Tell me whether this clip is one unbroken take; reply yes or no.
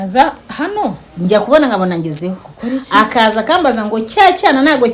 yes